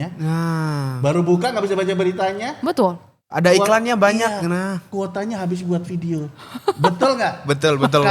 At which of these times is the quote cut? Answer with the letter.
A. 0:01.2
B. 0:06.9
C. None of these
C